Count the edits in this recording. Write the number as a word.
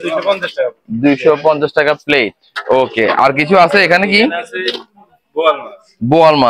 zero